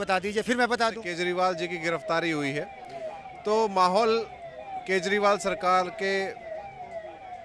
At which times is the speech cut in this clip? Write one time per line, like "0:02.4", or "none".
0:01.1